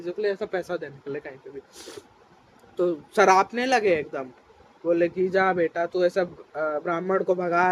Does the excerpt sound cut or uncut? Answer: uncut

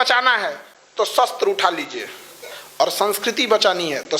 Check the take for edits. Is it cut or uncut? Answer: uncut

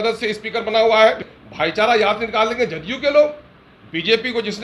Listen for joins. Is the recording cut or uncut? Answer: cut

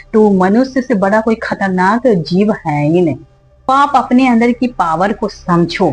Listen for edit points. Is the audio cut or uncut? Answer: cut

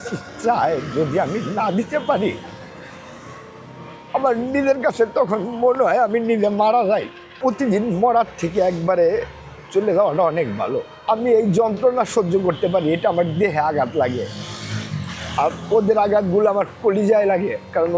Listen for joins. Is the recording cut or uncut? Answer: cut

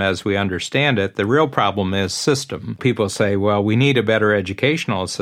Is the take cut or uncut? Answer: cut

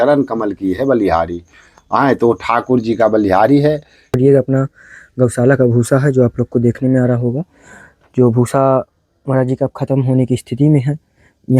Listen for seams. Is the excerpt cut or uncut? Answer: cut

